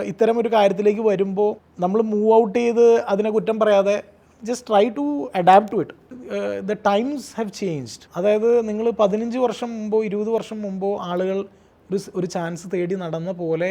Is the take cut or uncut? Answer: cut